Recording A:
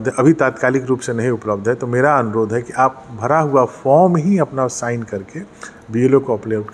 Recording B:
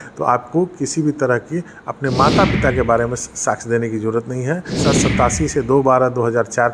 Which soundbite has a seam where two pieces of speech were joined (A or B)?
B